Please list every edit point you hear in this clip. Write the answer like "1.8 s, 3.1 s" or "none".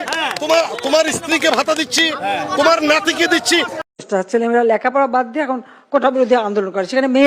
3.8 s